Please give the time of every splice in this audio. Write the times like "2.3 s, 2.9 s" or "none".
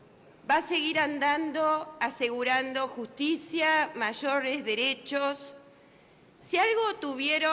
5.0 s